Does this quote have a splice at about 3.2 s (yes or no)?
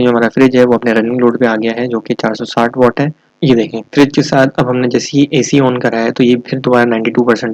yes